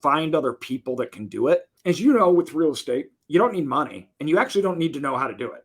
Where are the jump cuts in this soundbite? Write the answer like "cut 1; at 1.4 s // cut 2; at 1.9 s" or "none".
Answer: cut 1; at 1.7 s // cut 2; at 3.1 s